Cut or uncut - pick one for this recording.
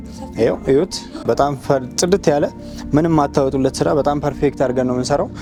uncut